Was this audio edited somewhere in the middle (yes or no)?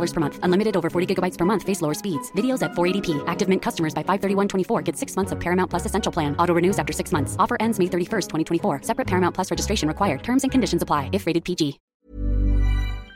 yes